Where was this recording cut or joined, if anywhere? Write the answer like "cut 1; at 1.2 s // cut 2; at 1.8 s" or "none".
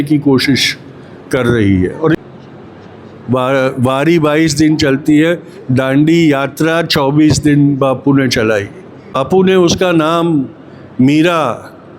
cut 1; at 2.2 s // cut 2; at 9.1 s